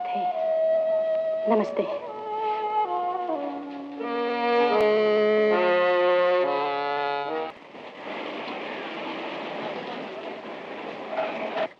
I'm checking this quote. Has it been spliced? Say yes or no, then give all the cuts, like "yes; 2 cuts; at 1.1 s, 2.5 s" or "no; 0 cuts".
yes; 1 cut; at 7.5 s